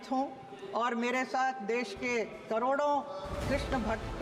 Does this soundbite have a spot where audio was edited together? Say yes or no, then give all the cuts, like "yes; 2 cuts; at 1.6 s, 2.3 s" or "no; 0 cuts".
no; 0 cuts